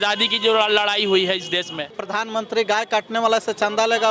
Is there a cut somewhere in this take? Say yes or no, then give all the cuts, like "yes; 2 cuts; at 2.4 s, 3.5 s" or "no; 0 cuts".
yes; 1 cut; at 2.0 s